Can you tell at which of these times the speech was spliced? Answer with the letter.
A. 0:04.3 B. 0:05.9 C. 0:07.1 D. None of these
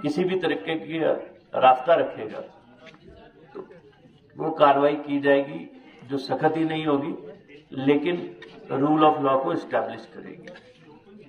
D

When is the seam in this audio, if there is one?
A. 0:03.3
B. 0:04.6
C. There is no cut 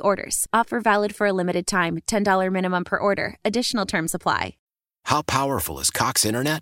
B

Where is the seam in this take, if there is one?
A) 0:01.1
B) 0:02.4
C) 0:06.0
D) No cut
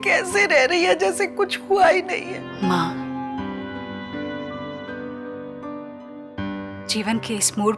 B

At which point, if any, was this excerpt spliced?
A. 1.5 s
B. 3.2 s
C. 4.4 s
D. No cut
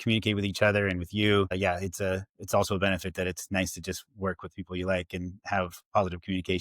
A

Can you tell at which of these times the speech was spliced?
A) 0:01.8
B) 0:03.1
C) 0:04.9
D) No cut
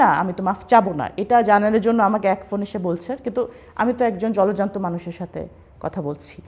D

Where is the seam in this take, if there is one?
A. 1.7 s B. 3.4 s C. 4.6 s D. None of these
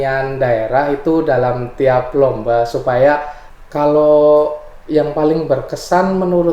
B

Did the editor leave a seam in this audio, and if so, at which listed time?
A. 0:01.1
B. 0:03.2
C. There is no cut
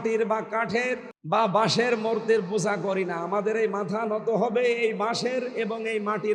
A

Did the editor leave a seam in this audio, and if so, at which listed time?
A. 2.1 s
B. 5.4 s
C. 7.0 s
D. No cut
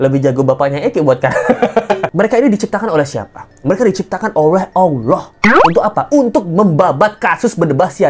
A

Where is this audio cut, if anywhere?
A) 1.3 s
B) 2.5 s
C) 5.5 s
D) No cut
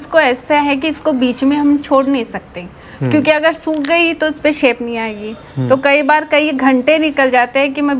D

